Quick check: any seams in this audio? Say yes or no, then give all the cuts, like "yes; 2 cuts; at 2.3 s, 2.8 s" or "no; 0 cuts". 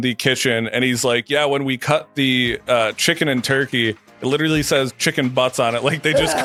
no; 0 cuts